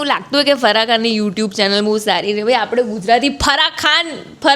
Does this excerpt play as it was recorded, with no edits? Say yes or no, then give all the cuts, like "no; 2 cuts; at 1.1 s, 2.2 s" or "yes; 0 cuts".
yes; 0 cuts